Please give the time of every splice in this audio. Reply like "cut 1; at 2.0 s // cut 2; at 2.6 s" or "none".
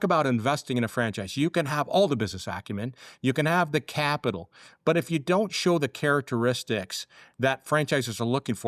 none